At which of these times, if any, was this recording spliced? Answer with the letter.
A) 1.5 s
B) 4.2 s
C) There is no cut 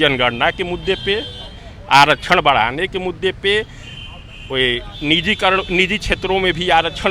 C